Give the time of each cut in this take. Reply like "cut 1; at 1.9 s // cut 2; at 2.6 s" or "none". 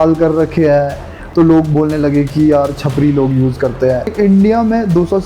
cut 1; at 1.1 s // cut 2; at 4.1 s